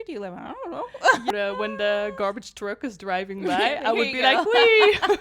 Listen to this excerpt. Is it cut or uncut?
cut